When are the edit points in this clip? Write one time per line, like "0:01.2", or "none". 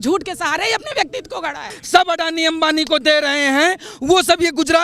0:01.7